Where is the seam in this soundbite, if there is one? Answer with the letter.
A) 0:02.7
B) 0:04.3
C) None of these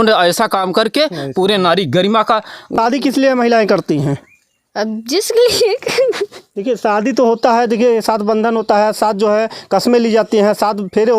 A